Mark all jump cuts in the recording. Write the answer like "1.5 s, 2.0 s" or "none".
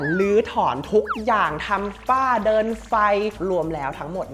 3.4 s